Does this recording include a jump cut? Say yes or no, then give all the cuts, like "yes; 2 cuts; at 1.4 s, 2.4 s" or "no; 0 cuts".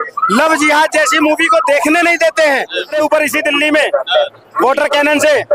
yes; 1 cut; at 2.9 s